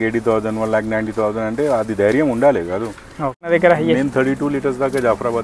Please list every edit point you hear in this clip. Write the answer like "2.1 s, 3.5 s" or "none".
3.4 s

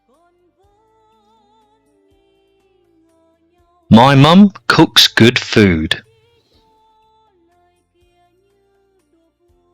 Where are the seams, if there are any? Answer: 3.2 s, 6.1 s

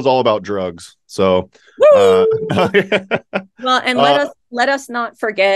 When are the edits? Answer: none

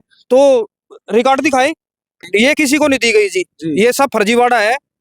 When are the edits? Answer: 2.2 s

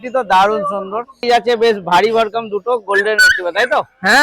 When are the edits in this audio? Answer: 1.2 s

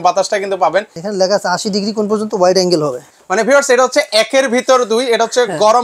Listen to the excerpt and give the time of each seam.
1.0 s, 3.1 s

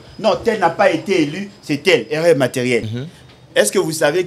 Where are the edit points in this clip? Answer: 3.0 s

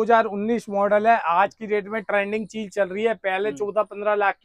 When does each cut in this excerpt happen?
none

